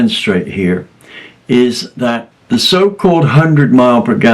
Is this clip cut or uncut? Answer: cut